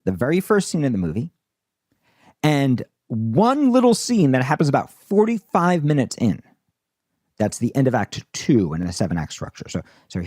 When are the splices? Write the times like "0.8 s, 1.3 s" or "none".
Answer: 8.9 s

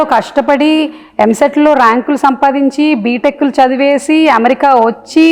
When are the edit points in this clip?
none

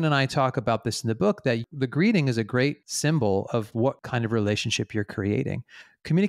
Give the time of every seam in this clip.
1.6 s

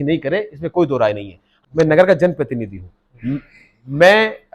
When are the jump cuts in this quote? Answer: 1.5 s

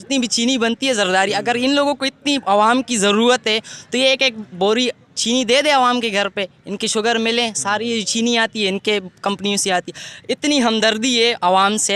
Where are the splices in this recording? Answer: none

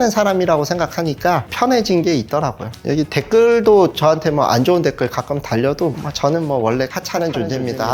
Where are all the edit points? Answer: none

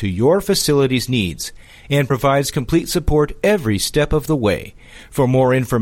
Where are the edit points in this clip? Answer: none

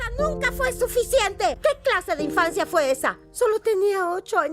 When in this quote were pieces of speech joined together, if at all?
1.8 s

